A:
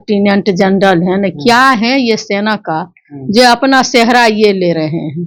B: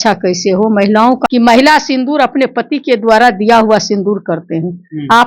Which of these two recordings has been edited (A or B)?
B